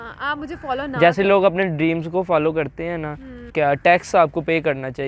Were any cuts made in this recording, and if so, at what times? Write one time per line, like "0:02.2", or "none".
0:03.4